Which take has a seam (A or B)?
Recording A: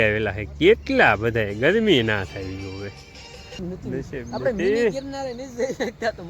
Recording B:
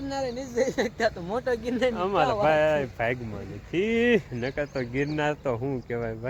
A